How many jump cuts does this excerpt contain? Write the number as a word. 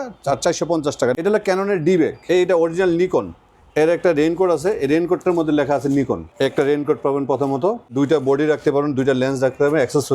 four